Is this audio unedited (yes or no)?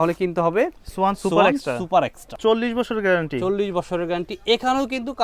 no